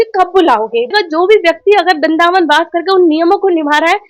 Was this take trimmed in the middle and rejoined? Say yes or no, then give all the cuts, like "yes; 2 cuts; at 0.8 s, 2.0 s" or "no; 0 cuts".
yes; 1 cut; at 0.9 s